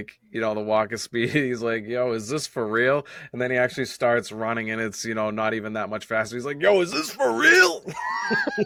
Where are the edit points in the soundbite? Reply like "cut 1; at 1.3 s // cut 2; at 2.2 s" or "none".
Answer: none

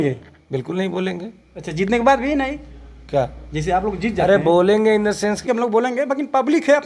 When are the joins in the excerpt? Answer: cut 1; at 5.5 s

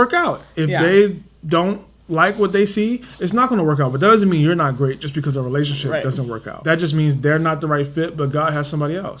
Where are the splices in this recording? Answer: cut 1; at 6.5 s

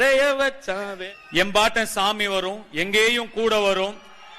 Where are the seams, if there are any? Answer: cut 1; at 0.9 s

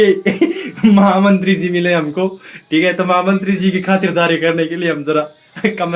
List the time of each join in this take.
none

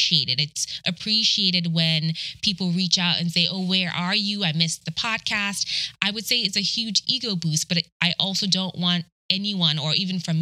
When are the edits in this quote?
cut 1; at 4.8 s // cut 2; at 9.1 s

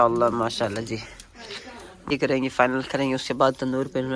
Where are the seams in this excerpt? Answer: cut 1; at 2.1 s

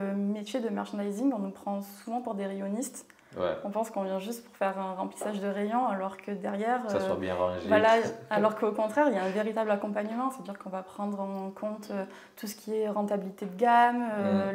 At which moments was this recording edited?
none

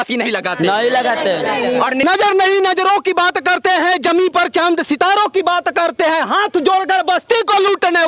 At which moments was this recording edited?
cut 1; at 2.0 s

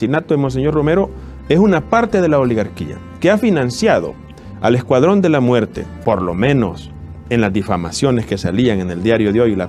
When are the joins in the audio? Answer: cut 1; at 5.9 s

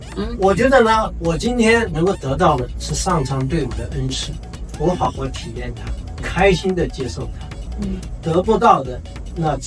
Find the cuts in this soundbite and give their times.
none

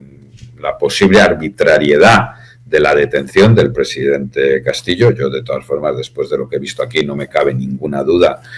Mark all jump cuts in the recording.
none

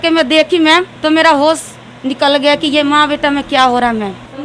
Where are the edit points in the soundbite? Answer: none

